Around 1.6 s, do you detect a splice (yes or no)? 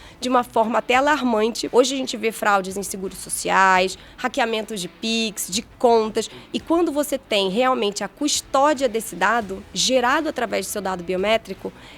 yes